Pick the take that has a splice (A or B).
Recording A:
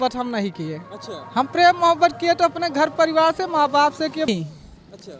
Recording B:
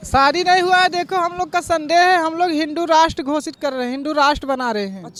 A